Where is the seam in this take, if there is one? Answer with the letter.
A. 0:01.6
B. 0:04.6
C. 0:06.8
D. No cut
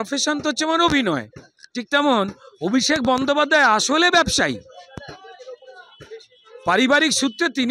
D